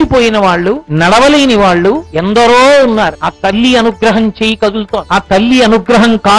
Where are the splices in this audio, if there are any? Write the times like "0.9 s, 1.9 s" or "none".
0.9 s, 2.1 s, 3.2 s, 5.0 s